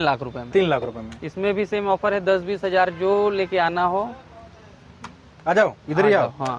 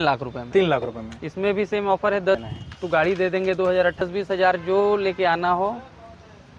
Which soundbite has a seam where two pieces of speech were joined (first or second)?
second